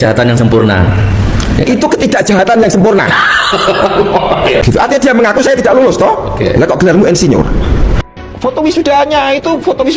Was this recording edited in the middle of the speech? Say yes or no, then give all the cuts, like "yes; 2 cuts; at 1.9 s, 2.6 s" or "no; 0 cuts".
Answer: yes; 2 cuts; at 4.6 s, 8.0 s